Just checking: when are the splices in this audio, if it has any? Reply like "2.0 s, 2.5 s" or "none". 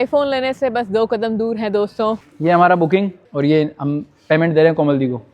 2.2 s, 3.2 s

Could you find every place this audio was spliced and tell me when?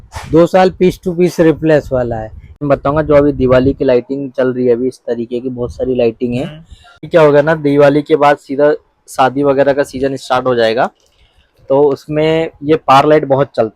2.6 s, 7.0 s

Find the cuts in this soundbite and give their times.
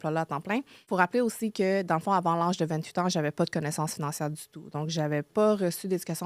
0.9 s, 5.3 s

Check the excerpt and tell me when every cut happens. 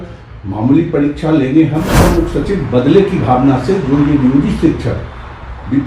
2.0 s

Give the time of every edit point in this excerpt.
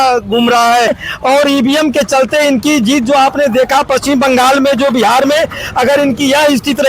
1.0 s

